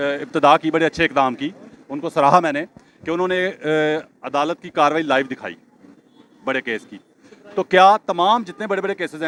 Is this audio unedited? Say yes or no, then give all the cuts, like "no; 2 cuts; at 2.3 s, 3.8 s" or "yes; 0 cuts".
yes; 0 cuts